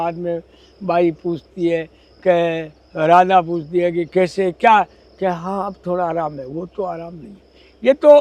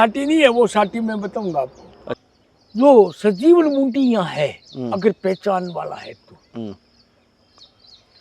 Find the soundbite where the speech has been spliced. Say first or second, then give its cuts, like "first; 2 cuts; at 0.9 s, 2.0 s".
second; 1 cut; at 2.2 s